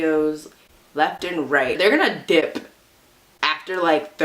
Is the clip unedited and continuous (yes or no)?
no